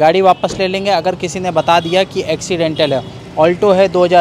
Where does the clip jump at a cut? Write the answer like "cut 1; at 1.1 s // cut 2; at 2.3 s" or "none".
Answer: none